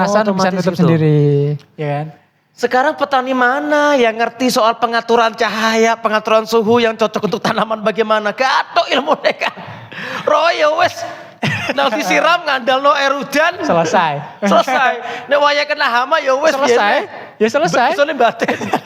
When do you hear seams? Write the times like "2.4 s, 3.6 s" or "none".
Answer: none